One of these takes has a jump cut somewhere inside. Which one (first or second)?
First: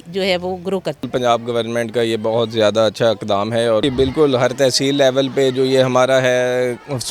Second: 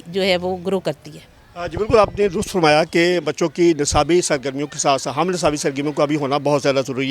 first